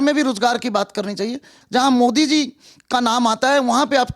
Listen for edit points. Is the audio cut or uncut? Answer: cut